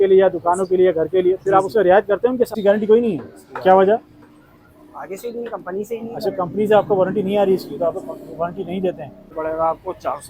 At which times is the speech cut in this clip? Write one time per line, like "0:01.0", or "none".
0:02.6
0:09.3